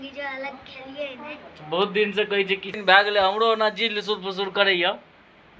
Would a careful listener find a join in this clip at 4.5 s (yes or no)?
no